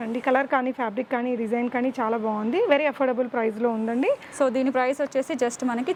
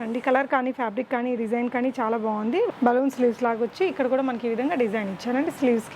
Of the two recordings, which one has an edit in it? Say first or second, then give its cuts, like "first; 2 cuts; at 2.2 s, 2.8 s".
second; 1 cut; at 2.7 s